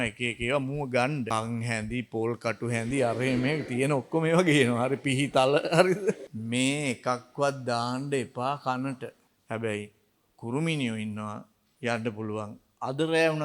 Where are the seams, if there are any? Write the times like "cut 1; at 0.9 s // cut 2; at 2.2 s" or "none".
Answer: cut 1; at 1.3 s // cut 2; at 6.3 s // cut 3; at 9.3 s

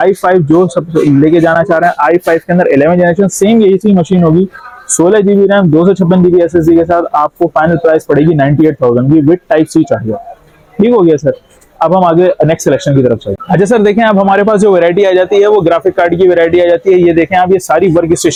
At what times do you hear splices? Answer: none

